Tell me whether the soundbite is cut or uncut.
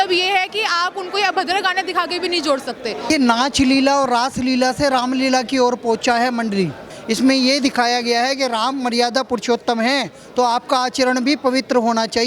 cut